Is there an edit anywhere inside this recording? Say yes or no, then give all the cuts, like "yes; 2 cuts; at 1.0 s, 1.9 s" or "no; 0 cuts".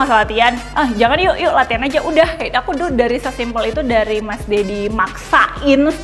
no; 0 cuts